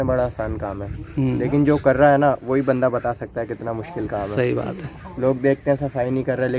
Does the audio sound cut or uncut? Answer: uncut